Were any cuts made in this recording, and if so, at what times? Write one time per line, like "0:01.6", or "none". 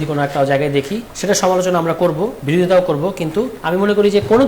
0:01.1
0:02.4
0:03.6